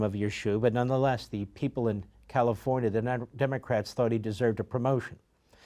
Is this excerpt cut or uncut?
uncut